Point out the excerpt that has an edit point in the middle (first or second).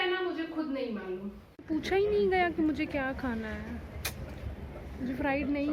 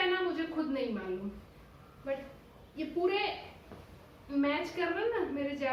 first